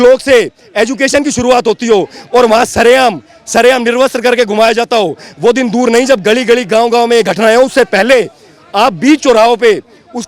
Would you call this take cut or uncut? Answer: uncut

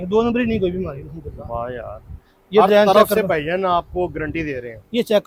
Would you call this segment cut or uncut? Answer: uncut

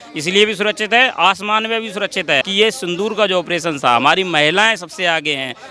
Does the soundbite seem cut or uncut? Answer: cut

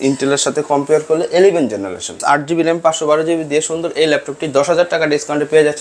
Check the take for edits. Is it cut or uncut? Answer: cut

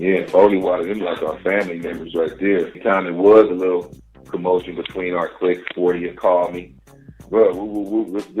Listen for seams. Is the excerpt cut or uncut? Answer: cut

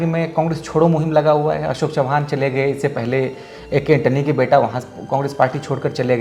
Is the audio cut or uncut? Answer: uncut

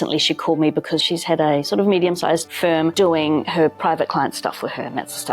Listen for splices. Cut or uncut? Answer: cut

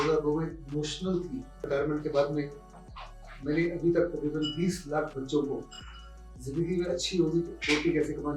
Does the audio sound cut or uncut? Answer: cut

